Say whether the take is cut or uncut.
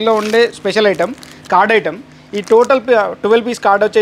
uncut